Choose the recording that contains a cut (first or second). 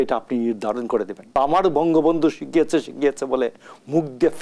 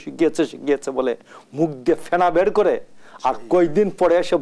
first